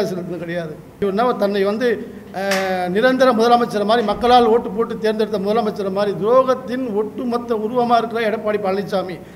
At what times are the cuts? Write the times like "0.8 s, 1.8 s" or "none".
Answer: 1.0 s